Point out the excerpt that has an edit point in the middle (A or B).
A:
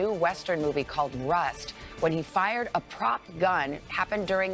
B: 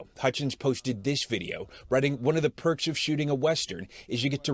B